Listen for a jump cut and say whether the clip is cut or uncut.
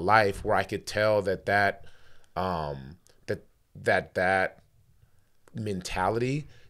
uncut